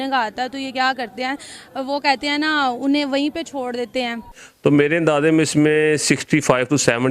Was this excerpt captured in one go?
no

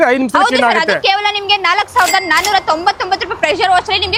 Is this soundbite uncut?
yes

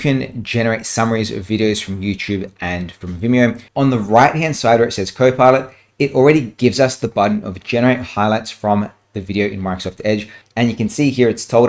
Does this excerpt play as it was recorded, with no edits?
no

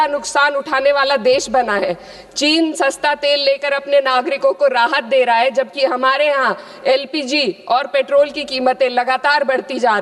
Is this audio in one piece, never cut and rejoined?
yes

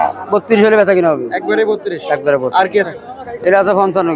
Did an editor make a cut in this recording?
yes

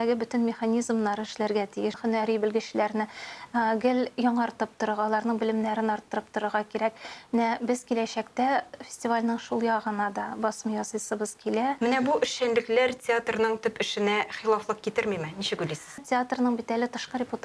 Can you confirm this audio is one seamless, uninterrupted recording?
no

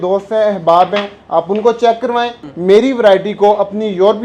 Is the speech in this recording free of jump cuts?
no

